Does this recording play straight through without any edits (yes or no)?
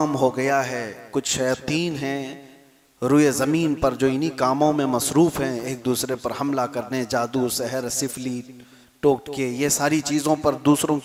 yes